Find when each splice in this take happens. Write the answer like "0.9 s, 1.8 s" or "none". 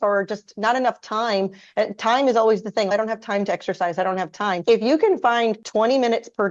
4.6 s, 5.6 s